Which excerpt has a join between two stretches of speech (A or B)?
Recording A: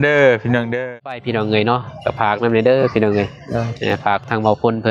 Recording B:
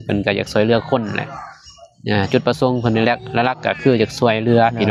A